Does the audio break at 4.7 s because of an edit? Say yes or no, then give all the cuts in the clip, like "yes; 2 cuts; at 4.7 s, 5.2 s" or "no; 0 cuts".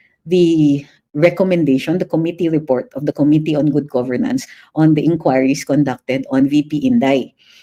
no; 0 cuts